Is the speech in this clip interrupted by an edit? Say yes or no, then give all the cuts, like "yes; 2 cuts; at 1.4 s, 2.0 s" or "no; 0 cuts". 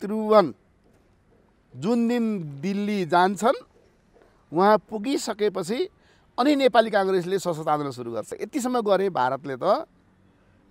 yes; 1 cut; at 8.4 s